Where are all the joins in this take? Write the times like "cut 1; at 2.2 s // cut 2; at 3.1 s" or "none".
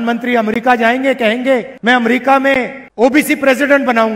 cut 1; at 1.7 s // cut 2; at 2.8 s